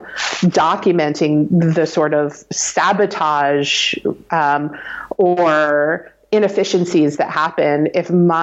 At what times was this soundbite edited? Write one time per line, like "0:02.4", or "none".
none